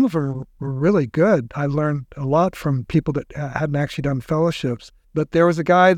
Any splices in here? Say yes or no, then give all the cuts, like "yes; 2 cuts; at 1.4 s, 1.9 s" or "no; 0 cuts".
yes; 1 cut; at 4.9 s